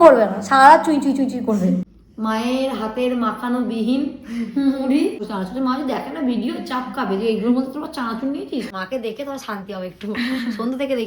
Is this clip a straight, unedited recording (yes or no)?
no